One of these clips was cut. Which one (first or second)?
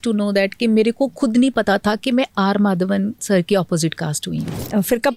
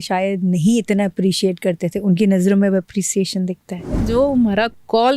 second